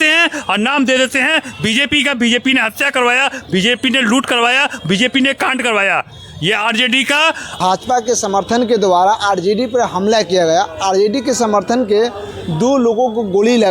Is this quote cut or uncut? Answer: cut